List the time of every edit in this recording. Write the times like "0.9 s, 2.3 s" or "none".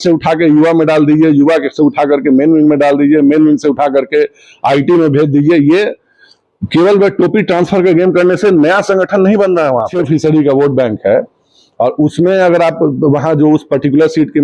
9.9 s